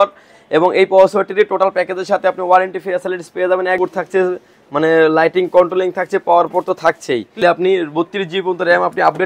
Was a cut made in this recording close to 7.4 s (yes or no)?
yes